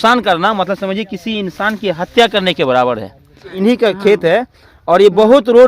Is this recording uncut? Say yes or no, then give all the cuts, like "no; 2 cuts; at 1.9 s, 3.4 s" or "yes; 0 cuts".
no; 1 cut; at 3.6 s